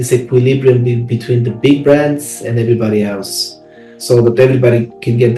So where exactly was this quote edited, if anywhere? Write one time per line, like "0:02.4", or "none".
none